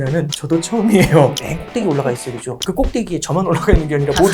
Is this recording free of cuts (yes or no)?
no